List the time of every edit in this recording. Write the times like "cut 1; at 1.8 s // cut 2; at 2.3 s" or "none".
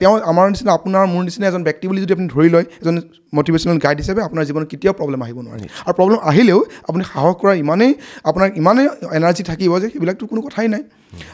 none